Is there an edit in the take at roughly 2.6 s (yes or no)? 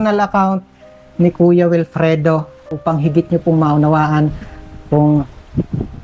yes